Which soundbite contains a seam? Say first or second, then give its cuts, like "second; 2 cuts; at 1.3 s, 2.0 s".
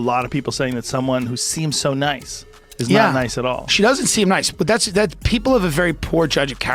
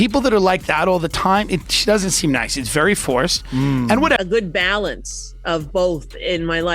second; 1 cut; at 4.2 s